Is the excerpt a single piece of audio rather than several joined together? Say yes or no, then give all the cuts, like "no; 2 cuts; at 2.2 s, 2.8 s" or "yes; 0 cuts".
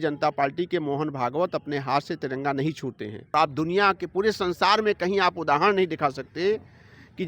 no; 1 cut; at 3.3 s